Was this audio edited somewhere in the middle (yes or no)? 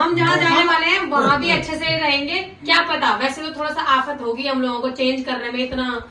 no